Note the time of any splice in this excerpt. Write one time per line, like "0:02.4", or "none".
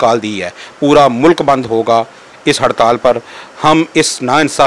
none